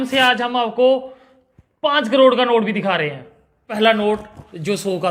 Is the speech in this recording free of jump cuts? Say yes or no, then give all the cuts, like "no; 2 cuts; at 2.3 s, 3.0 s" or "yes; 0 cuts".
no; 1 cut; at 3.7 s